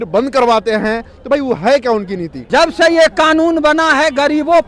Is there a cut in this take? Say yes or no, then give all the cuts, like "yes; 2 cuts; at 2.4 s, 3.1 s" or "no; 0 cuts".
yes; 1 cut; at 2.3 s